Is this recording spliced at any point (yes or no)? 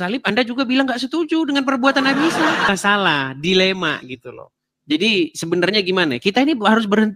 yes